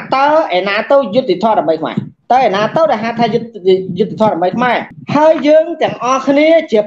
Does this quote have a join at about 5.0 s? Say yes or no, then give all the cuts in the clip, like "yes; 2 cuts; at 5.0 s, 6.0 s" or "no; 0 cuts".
yes; 1 cut; at 5.0 s